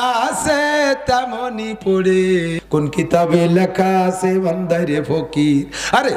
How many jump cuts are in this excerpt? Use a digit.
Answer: 1